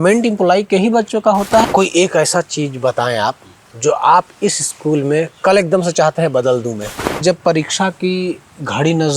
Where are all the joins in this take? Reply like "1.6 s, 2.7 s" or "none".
1.6 s, 7.2 s